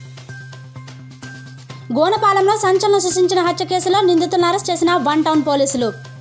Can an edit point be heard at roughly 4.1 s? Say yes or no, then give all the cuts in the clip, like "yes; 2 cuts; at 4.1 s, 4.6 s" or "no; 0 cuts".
no; 0 cuts